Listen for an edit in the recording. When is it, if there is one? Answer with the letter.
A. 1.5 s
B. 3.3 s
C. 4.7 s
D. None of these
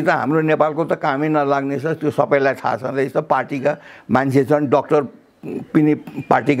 D